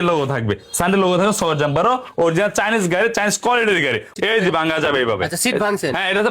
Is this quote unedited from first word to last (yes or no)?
no